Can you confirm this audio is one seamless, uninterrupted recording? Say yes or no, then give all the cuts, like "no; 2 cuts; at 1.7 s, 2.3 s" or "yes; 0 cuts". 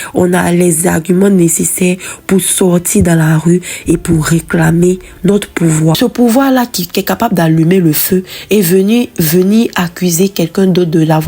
no; 1 cut; at 6.0 s